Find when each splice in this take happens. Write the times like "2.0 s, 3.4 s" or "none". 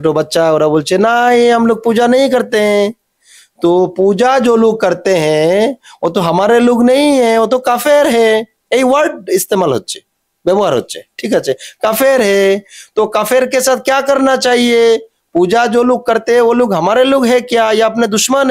none